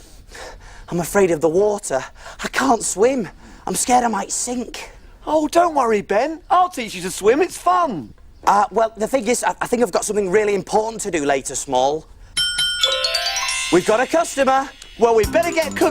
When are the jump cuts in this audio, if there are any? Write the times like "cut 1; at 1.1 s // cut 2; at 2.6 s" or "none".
cut 1; at 9.6 s

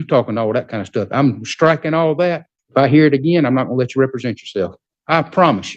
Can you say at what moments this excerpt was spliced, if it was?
cut 1; at 2.5 s // cut 2; at 4.9 s

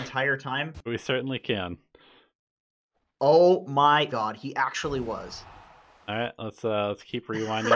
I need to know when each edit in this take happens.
cut 1; at 4.1 s

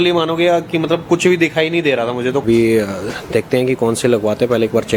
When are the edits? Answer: cut 1; at 2.4 s

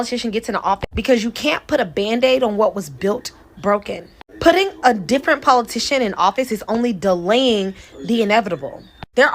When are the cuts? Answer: none

